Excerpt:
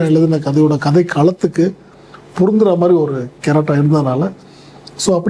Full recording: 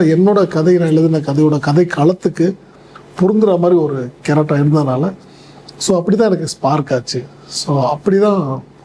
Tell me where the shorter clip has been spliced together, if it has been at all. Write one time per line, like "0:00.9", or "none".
none